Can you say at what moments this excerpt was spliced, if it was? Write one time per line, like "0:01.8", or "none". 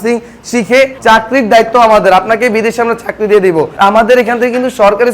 0:01.0
0:03.7